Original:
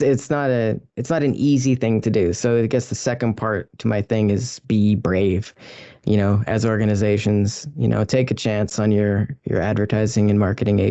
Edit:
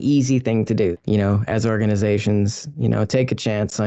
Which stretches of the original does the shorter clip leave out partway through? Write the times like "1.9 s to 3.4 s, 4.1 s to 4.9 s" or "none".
2.3 s to 6.0 s